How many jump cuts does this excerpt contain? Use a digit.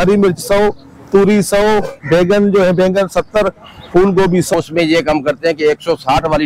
1